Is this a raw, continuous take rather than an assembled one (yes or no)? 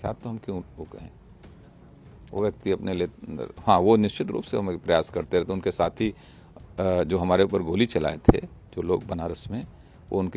yes